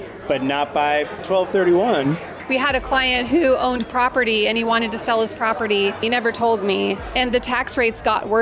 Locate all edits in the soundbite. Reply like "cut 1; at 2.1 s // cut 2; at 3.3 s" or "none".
cut 1; at 1.2 s // cut 2; at 2.3 s // cut 3; at 6.0 s // cut 4; at 7.1 s